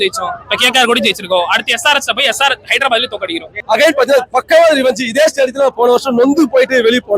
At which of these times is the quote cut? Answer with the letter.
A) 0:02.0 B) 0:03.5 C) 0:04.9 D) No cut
B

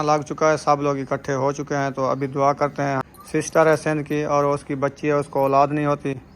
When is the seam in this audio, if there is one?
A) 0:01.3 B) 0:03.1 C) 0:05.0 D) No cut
B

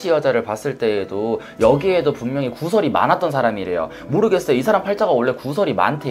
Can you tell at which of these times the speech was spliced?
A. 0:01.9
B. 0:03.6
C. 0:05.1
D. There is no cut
D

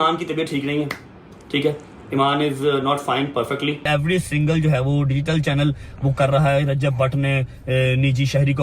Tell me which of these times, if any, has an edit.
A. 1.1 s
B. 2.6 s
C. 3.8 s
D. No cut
C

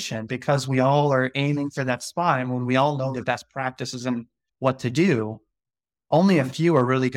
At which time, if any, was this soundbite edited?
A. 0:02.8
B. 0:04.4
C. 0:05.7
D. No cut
B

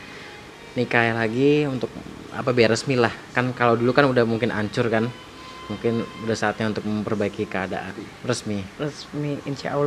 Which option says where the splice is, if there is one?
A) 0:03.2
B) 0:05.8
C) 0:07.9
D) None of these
C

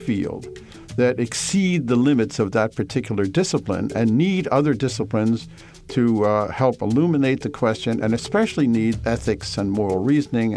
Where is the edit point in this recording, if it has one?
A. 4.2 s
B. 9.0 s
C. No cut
B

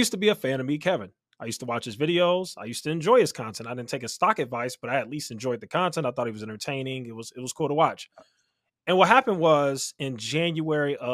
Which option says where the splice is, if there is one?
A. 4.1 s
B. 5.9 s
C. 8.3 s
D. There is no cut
D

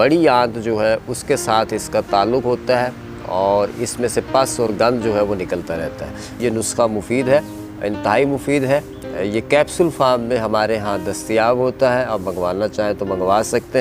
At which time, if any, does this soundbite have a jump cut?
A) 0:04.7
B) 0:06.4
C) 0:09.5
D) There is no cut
B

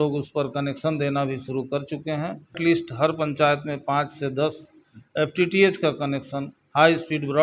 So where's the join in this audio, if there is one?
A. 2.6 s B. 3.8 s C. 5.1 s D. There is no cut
A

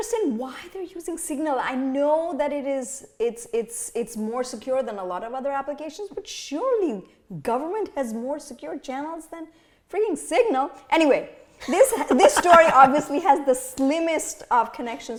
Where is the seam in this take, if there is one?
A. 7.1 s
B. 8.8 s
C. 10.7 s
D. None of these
D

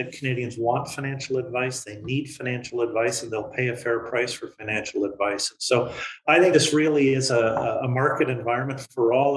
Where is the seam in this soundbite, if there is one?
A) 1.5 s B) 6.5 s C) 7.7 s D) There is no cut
B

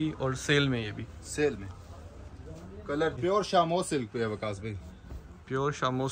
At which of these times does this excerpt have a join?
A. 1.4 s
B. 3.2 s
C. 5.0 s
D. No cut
B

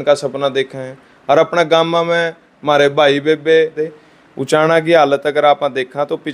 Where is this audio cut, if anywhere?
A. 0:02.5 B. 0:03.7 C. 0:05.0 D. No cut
B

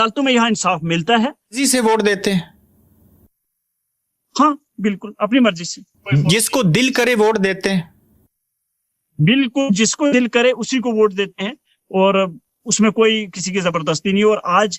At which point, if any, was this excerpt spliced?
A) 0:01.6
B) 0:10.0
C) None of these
A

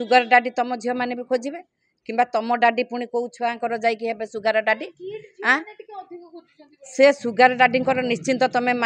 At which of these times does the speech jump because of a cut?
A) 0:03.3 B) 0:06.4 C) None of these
C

